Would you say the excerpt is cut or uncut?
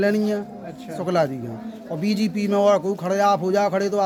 uncut